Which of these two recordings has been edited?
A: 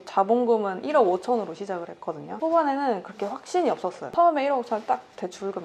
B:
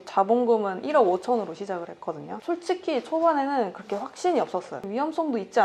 A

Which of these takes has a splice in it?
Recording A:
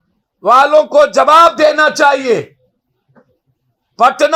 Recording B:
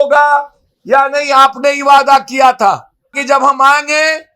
B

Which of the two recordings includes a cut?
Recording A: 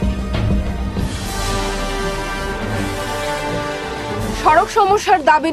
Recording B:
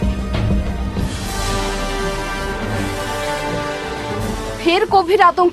A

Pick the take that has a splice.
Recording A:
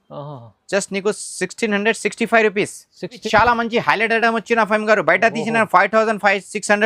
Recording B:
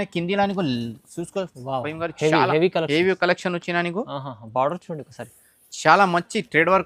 A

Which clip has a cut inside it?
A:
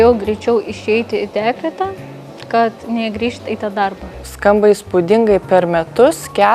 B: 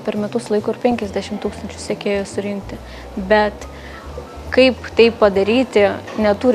A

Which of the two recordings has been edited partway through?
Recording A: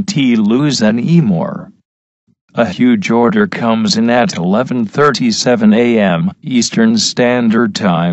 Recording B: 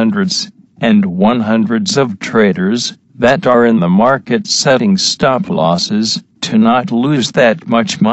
A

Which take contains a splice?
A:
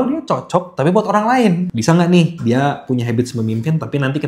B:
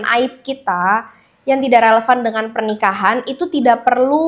A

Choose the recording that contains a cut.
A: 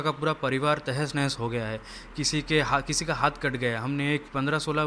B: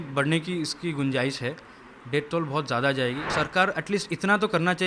B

